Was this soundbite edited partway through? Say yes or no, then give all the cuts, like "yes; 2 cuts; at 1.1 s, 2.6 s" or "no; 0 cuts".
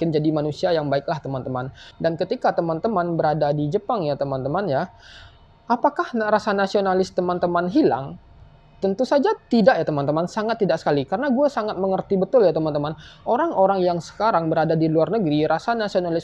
yes; 1 cut; at 1.8 s